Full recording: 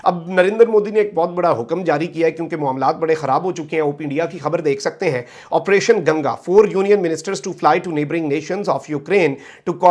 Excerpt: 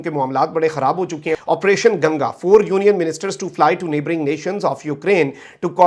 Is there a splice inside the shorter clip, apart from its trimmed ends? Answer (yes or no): yes